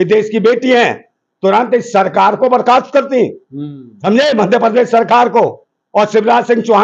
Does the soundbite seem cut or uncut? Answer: uncut